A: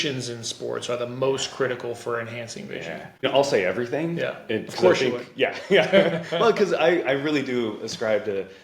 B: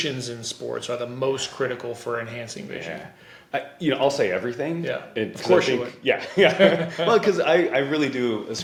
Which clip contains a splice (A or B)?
A